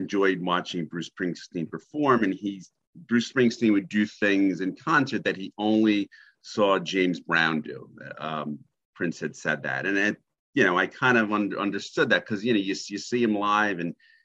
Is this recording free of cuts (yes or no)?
yes